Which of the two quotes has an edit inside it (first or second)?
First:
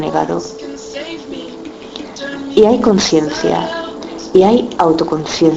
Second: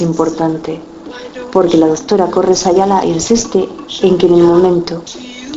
second